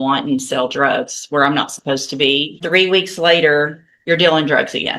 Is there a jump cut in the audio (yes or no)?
yes